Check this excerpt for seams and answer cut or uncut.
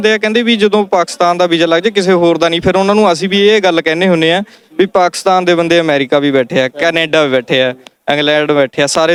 uncut